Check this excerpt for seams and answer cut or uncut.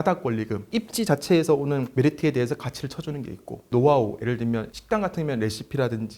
uncut